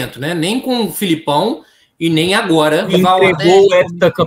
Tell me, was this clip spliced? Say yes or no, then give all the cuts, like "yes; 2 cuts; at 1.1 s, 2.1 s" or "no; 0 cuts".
yes; 1 cut; at 2.9 s